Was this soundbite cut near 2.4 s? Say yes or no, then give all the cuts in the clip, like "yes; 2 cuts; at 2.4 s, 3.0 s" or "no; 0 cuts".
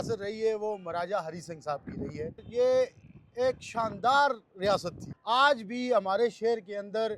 yes; 2 cuts; at 2.4 s, 5.1 s